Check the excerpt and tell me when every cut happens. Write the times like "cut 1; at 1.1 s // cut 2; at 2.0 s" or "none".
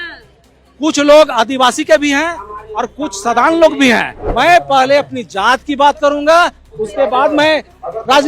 cut 1; at 4.2 s